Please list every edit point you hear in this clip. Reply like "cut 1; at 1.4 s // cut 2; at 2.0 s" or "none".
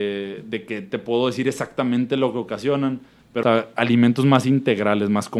cut 1; at 3.4 s